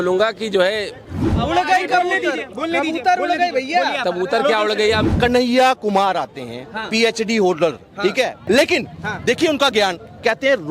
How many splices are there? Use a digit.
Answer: 3